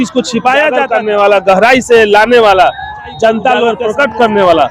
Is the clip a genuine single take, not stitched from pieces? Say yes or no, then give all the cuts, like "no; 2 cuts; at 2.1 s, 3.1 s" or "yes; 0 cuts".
no; 2 cuts; at 0.9 s, 3.8 s